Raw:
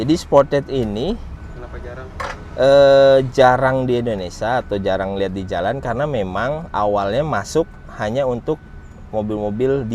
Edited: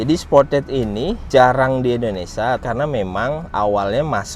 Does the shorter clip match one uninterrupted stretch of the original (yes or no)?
no